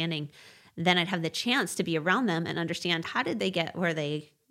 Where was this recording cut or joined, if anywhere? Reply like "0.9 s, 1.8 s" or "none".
3.1 s